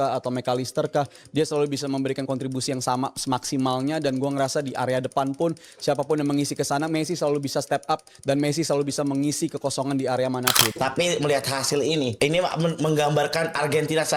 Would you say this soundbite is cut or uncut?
cut